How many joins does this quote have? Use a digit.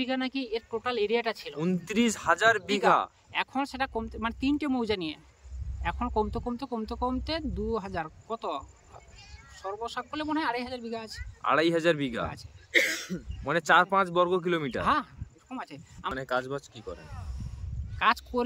0